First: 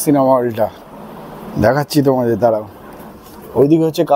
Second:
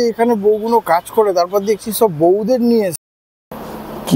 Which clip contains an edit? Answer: second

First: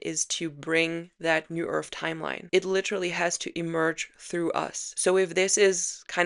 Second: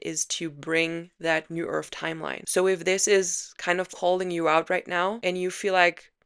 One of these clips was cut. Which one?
second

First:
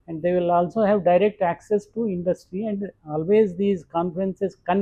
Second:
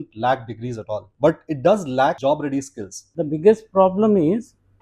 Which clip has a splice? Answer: second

